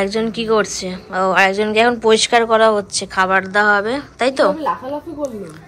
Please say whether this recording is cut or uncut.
uncut